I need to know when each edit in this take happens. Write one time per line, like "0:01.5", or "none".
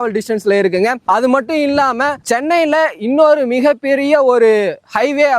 none

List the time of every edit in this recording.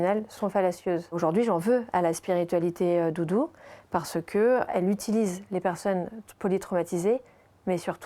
0:01.2
0:04.7

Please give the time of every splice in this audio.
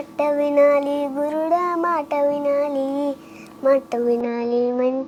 none

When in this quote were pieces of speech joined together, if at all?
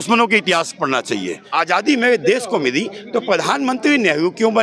0:01.4

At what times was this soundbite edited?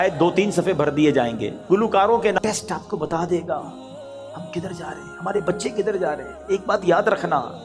0:02.4

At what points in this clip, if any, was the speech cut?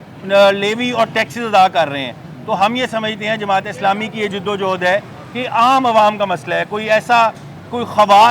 none

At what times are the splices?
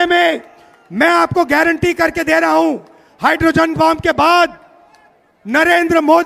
none

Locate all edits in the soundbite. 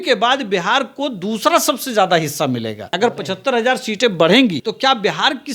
0:02.9
0:04.7

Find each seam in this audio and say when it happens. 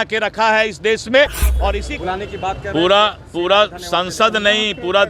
0:01.7

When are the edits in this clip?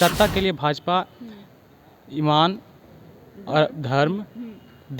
none

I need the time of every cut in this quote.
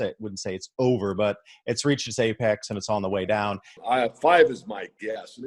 0:03.8

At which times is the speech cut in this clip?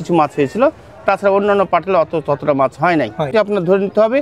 0:03.3

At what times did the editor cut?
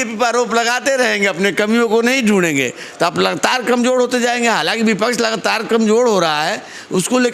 none

